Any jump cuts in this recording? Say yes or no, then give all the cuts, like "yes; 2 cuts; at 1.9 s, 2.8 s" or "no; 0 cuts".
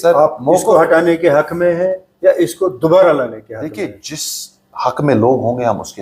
no; 0 cuts